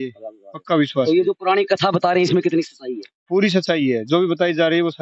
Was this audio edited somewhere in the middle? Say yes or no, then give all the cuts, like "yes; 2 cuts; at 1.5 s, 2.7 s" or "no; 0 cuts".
no; 0 cuts